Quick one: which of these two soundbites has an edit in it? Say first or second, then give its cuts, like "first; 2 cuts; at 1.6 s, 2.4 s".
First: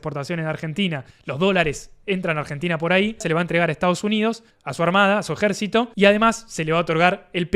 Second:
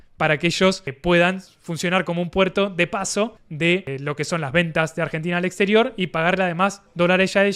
first; 2 cuts; at 3.2 s, 5.9 s